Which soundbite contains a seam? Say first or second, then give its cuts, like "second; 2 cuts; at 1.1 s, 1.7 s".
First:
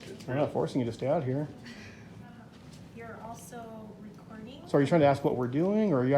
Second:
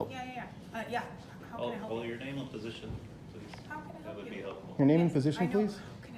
first; 1 cut; at 2.6 s